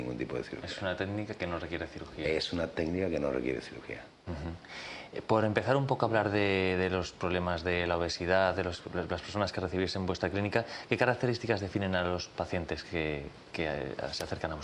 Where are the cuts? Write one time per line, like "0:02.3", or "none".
none